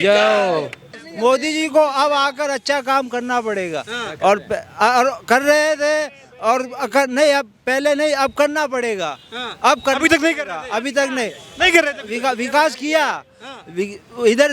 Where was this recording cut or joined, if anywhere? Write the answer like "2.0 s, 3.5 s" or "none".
1.0 s